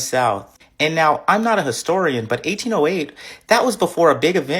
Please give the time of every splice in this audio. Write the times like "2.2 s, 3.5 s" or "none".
none